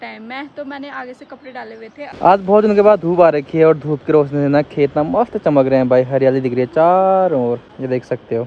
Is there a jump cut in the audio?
no; 0 cuts

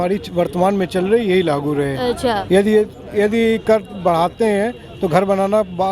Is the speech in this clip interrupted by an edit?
no; 0 cuts

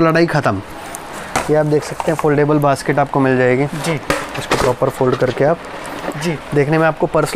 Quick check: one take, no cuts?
no; 2 cuts; at 1.2 s, 6.2 s

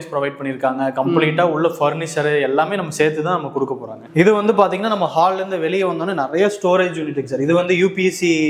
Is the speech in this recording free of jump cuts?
yes; 0 cuts

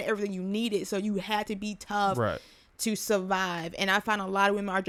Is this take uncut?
yes; 0 cuts

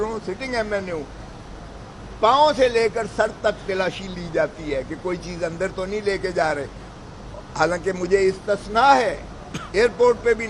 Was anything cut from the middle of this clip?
no; 0 cuts

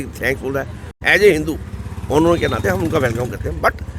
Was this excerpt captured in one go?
no; 1 cut; at 1.0 s

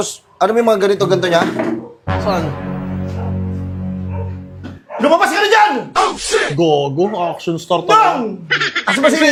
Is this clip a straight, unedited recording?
yes; 0 cuts

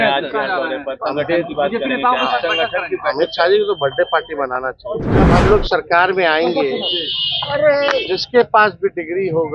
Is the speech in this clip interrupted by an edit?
yes; 1 cut; at 5.2 s

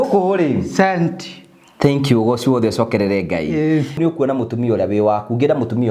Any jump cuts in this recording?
yes; 1 cut; at 4.0 s

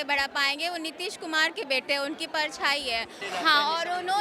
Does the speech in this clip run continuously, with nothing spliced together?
no; 1 cut; at 3.2 s

